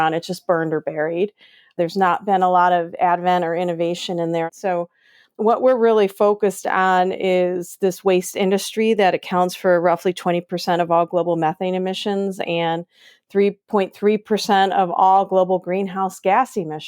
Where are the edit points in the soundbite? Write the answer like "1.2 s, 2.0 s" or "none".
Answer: 4.5 s